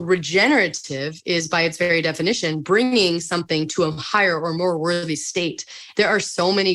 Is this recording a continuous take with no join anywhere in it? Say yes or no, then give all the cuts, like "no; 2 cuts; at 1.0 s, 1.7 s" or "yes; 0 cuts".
no; 1 cut; at 5.8 s